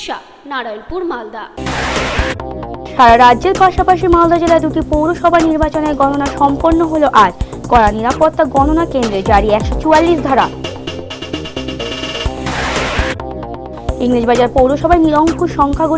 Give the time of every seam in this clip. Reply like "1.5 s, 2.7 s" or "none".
1.5 s